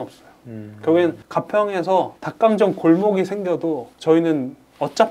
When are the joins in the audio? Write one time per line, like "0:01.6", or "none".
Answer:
0:01.2
0:02.2
0:03.9